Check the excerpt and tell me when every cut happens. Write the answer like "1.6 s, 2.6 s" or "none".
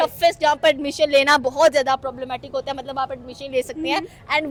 none